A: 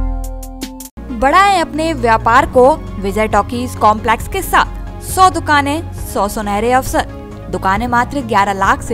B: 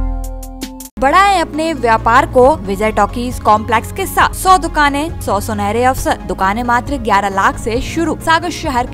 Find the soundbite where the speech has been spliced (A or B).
B